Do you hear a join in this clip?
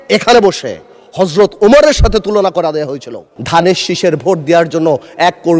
yes; 1 cut; at 3.3 s

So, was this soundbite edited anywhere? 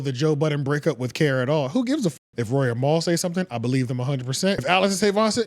yes; 2 cuts; at 2.1 s, 4.6 s

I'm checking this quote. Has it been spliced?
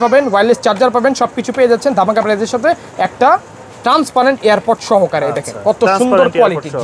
no; 0 cuts

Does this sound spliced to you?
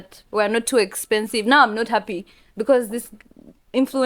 no; 0 cuts

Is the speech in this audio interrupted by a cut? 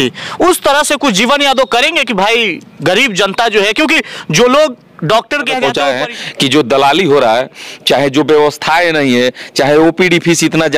yes; 1 cut; at 5.6 s

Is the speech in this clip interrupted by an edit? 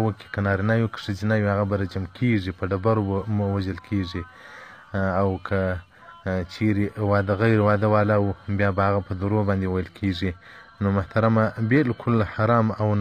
no; 0 cuts

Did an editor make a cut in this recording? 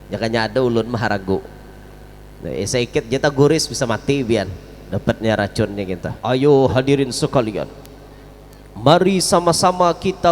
yes; 1 cut; at 6.1 s

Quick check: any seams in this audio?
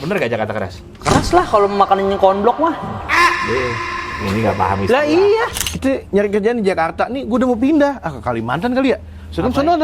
yes; 1 cut; at 5.6 s

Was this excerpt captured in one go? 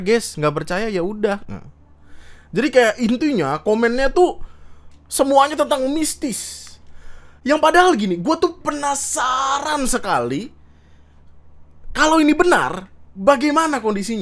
yes; 0 cuts

